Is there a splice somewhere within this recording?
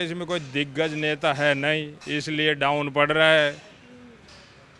no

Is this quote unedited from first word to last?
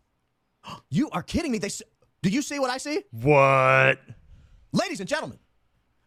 yes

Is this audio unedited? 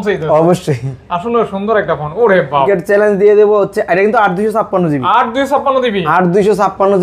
no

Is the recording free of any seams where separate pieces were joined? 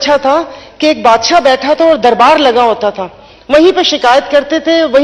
yes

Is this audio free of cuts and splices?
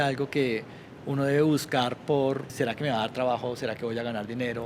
no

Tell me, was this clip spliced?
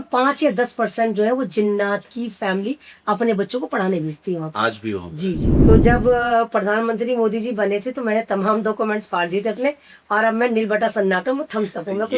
yes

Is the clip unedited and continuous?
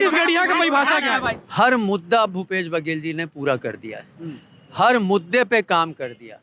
no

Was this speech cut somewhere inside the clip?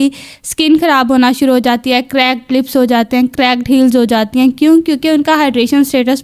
no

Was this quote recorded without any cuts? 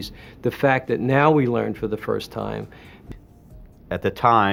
yes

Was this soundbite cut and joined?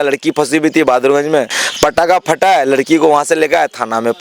yes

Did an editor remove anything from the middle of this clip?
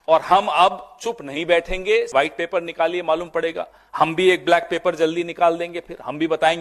yes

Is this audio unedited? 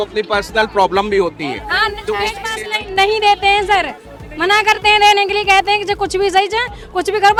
yes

